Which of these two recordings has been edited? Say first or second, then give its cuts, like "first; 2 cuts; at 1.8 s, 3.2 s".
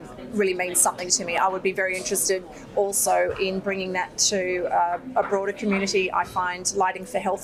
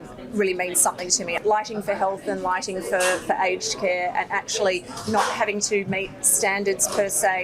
second; 1 cut; at 1.3 s